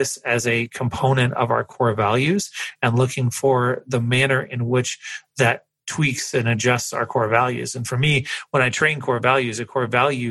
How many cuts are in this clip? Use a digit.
0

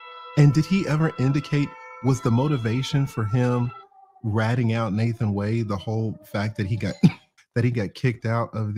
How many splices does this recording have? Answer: 1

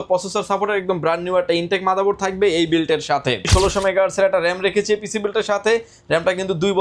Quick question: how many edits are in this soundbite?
1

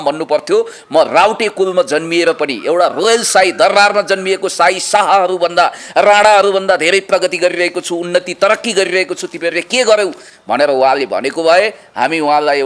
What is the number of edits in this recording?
0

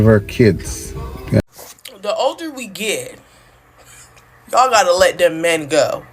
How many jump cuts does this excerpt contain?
1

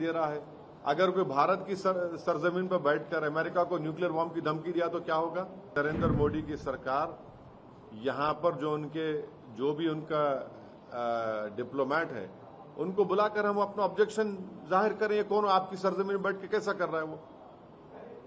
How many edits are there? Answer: 1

